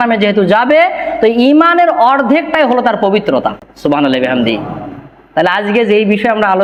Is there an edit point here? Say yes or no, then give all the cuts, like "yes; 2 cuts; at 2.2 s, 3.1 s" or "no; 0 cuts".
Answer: no; 0 cuts